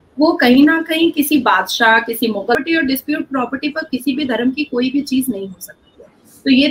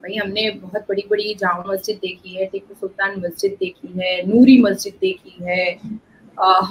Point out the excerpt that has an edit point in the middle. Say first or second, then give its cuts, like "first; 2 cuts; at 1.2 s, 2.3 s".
first; 1 cut; at 2.5 s